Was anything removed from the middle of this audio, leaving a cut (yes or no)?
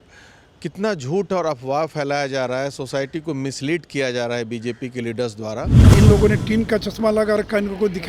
yes